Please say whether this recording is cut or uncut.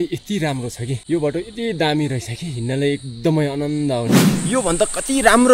cut